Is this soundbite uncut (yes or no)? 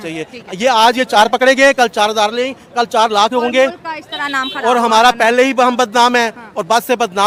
yes